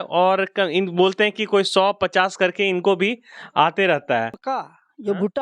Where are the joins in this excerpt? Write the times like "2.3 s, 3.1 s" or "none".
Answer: 4.4 s